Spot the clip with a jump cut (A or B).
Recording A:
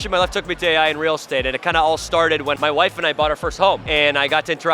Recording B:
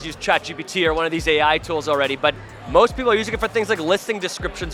A